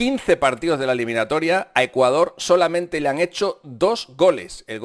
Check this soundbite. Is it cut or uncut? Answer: uncut